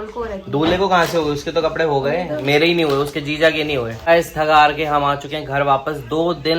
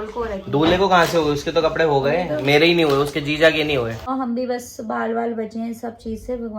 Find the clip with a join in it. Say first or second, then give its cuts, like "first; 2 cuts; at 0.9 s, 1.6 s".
second; 1 cut; at 4.1 s